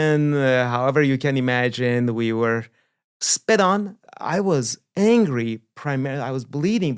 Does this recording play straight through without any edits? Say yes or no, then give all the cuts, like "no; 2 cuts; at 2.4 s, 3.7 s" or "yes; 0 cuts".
no; 1 cut; at 4.0 s